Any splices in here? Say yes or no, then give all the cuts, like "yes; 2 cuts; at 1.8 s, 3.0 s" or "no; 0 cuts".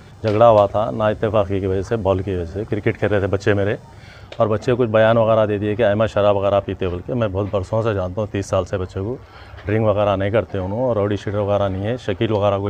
no; 0 cuts